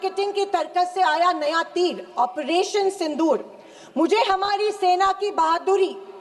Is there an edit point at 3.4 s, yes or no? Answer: no